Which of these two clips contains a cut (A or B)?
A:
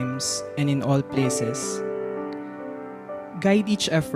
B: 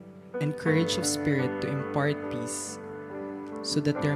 A